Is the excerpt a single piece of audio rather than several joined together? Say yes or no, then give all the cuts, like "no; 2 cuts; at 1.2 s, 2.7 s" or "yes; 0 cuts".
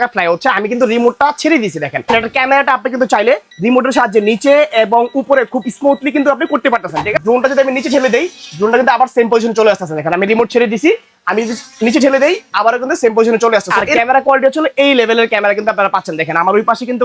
no; 3 cuts; at 2.1 s, 7.2 s, 13.8 s